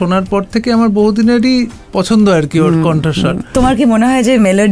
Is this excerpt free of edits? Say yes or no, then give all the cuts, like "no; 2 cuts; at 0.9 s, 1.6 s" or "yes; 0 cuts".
no; 1 cut; at 3.5 s